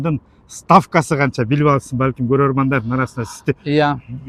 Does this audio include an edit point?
no; 0 cuts

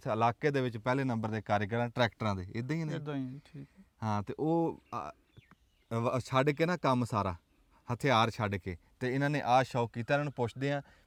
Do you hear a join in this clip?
no; 0 cuts

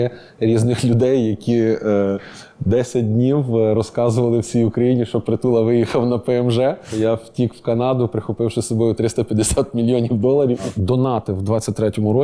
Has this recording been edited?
yes; 2 cuts; at 6.9 s, 10.7 s

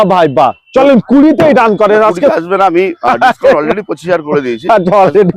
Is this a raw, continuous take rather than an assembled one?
yes; 0 cuts

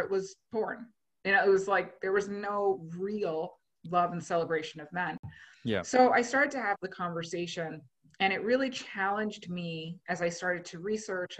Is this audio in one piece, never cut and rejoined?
yes; 0 cuts

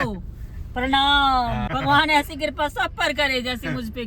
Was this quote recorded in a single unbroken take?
no; 1 cut; at 1.7 s

